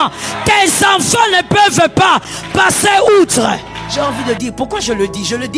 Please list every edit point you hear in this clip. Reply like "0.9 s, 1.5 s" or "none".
3.8 s